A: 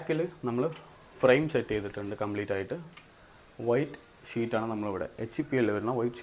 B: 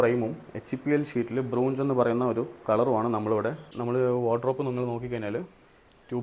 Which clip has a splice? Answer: B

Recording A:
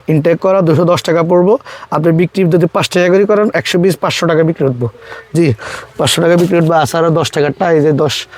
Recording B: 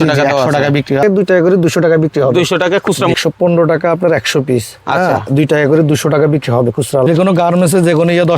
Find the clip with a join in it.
B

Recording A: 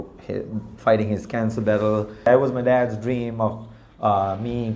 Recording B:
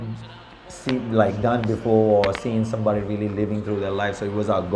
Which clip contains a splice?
A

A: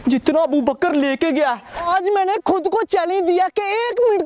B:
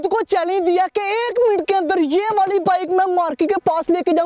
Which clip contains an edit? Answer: A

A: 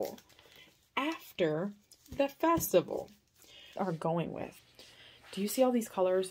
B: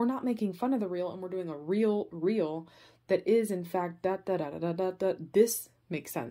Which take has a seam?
A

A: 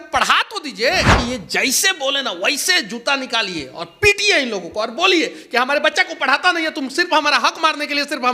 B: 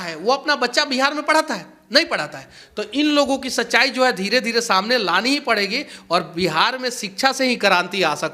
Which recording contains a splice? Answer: A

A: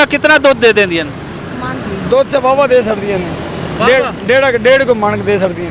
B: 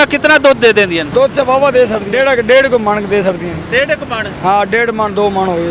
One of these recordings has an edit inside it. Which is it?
B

